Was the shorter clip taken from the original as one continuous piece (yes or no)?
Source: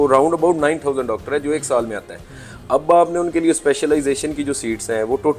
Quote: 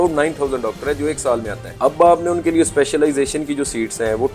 no